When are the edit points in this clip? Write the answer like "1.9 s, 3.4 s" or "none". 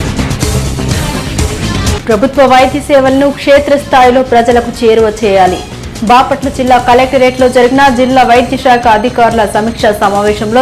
1.2 s